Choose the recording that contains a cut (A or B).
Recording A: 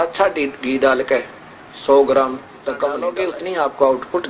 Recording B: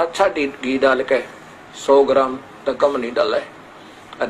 A